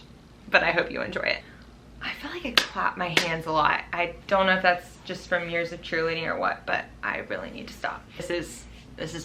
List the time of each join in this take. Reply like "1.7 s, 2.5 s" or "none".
1.5 s, 8.2 s